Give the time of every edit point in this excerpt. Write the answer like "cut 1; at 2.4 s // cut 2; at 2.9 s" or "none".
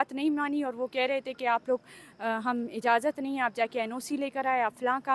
none